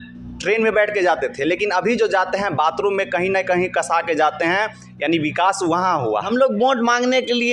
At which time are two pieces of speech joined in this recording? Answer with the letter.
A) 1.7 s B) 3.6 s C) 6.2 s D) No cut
C